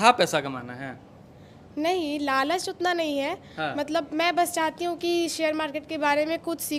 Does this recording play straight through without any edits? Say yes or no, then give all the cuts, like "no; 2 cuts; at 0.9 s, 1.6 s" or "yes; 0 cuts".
yes; 0 cuts